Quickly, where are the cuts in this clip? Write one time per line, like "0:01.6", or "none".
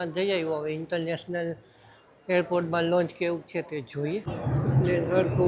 0:04.3